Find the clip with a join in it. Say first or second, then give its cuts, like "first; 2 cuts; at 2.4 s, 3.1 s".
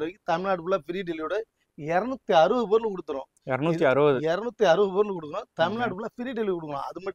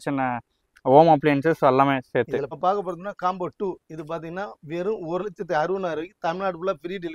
second; 1 cut; at 2.5 s